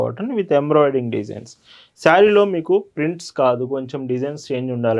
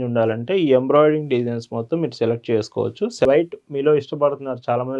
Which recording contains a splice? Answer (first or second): second